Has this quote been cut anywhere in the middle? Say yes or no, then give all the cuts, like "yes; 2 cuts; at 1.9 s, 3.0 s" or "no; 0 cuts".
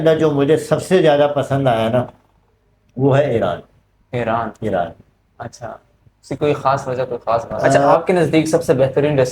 yes; 1 cut; at 7.9 s